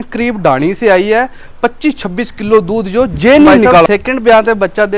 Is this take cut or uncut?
cut